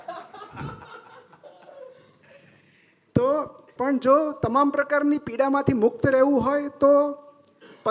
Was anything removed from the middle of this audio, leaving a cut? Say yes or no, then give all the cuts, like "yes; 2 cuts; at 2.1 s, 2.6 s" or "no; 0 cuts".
yes; 1 cut; at 3.6 s